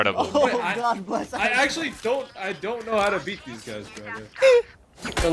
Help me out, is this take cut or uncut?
uncut